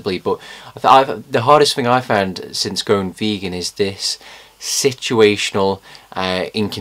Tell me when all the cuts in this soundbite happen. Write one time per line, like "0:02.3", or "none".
none